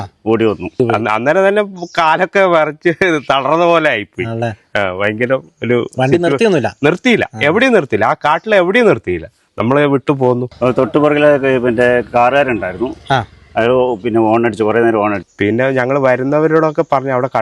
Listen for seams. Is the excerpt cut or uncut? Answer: cut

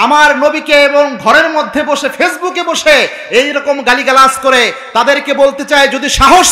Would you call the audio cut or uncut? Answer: uncut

